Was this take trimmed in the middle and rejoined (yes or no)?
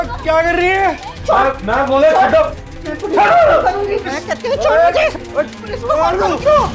yes